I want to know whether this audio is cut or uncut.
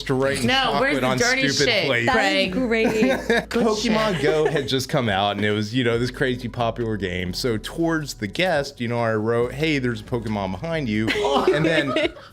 cut